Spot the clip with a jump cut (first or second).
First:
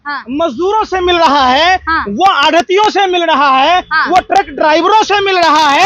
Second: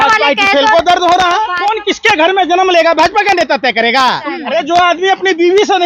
second